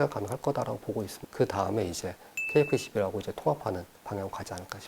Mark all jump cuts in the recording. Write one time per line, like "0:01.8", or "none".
0:01.2